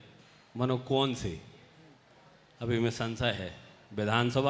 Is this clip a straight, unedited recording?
yes; 0 cuts

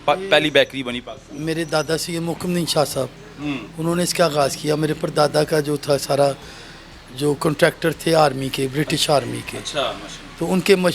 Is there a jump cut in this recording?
no; 0 cuts

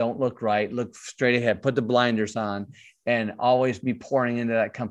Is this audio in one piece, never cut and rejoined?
yes; 0 cuts

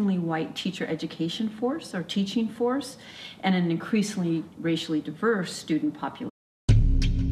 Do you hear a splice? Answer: no; 0 cuts

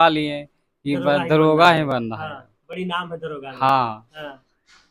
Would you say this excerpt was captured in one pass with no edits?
yes; 0 cuts

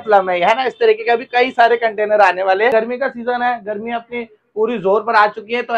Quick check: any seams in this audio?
yes; 1 cut; at 2.7 s

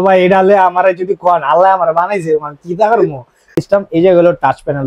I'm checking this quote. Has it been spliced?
yes; 1 cut; at 3.4 s

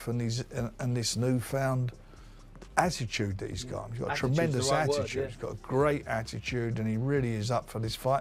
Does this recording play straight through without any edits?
yes; 0 cuts

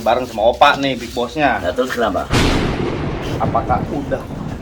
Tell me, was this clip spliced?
yes; 2 cuts; at 2.3 s, 3.4 s

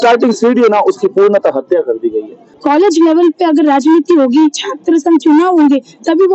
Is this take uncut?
no; 1 cut; at 2.5 s

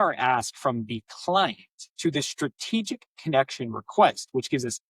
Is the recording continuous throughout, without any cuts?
yes; 0 cuts

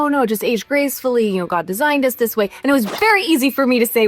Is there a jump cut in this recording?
no; 0 cuts

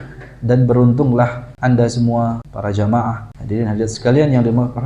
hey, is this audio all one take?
no; 3 cuts; at 1.4 s, 2.5 s, 3.3 s

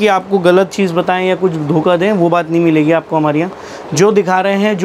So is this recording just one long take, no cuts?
yes; 0 cuts

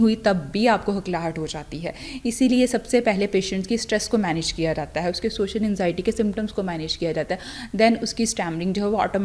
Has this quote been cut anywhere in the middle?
no; 0 cuts

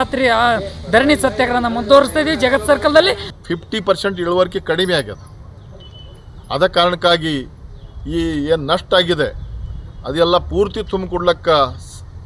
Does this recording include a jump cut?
yes; 1 cut; at 3.3 s

